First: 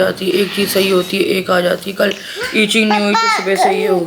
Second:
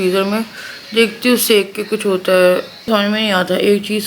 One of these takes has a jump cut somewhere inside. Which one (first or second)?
second